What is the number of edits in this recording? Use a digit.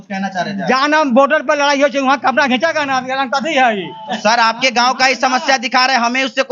0